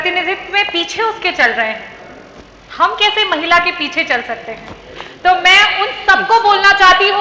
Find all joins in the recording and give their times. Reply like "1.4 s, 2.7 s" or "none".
none